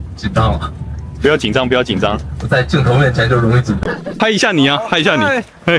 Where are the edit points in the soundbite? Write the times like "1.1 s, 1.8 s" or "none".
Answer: 4.1 s

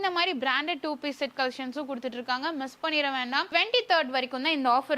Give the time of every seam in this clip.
3.5 s

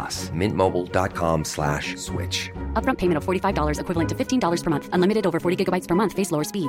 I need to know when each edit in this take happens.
none

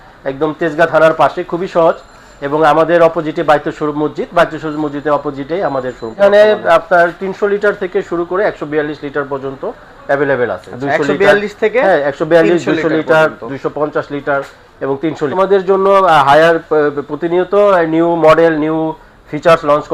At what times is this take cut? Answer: 6.2 s, 15.3 s

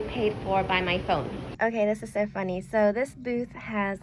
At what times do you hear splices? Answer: 1.4 s

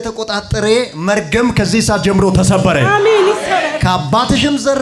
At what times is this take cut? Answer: none

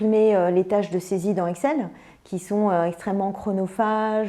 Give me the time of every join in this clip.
none

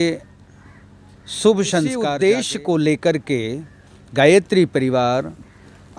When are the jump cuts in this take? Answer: 2.0 s

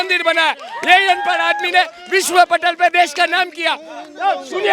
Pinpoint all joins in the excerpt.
none

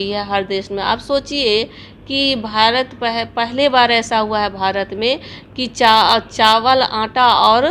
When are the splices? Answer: none

